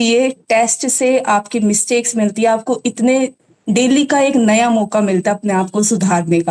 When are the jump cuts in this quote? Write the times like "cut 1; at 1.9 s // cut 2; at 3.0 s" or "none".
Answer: none